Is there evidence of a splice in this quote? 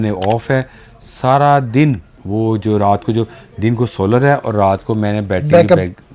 yes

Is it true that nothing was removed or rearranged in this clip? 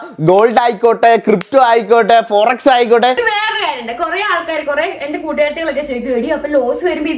no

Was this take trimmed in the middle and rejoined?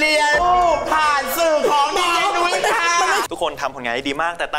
yes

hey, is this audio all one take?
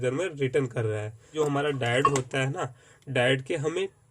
no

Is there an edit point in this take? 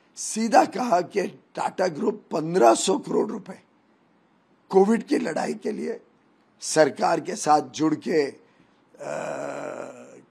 no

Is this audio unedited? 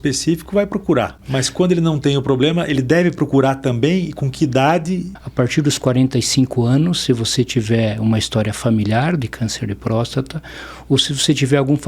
no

